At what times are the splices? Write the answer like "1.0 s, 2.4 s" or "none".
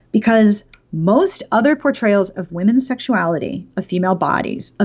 none